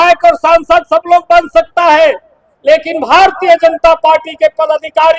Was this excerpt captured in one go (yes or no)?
yes